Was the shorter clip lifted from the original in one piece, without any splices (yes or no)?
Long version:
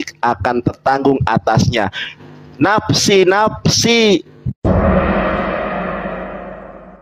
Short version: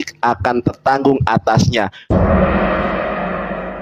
no